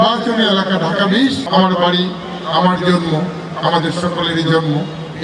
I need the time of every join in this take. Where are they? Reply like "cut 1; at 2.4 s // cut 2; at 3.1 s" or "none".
cut 1; at 1.4 s

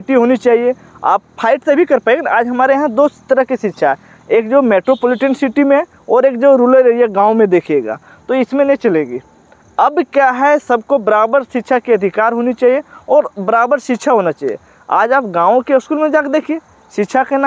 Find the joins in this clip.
none

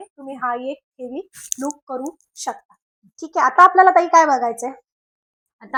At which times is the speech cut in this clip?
none

